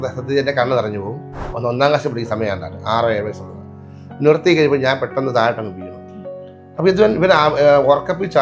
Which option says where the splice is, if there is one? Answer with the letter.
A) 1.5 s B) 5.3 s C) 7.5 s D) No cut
A